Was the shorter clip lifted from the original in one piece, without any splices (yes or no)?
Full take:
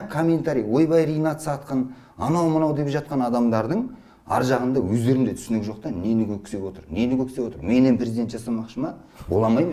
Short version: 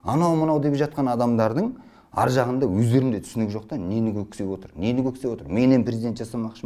yes